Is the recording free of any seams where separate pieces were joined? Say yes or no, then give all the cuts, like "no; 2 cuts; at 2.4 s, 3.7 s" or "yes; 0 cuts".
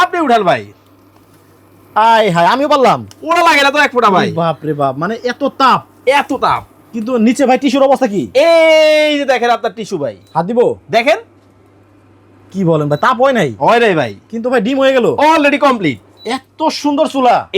yes; 0 cuts